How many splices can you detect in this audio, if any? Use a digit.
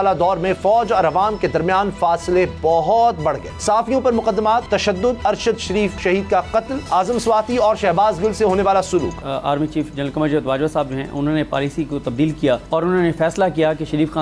6